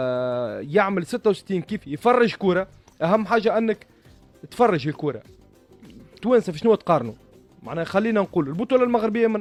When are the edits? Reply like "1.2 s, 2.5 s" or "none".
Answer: none